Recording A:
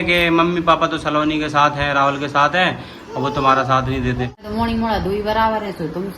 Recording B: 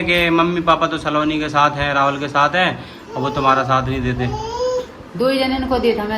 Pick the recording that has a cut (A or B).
A